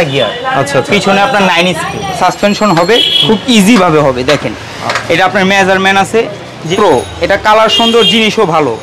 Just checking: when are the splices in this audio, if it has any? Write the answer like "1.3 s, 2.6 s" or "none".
2.2 s, 6.7 s